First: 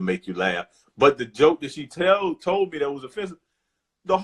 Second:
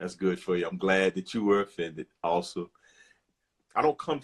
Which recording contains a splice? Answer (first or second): second